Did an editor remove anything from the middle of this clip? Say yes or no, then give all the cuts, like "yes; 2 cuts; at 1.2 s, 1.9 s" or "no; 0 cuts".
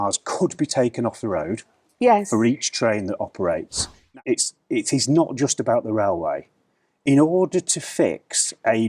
yes; 1 cut; at 4.1 s